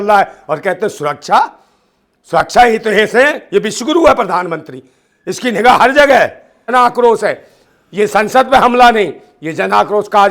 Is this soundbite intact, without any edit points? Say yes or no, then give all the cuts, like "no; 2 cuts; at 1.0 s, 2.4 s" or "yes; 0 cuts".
no; 1 cut; at 6.7 s